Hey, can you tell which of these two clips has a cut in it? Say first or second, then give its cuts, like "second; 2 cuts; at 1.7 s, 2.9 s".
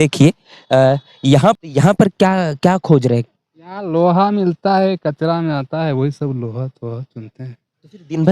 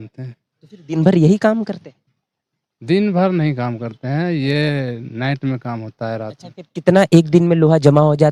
first; 1 cut; at 1.6 s